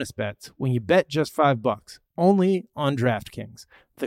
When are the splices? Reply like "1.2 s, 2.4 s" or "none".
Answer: none